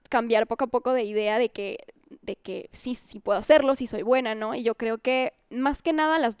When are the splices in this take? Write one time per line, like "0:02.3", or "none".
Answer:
none